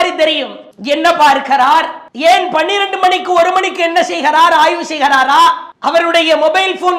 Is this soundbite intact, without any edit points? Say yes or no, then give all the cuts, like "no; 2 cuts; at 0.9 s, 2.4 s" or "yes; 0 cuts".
yes; 0 cuts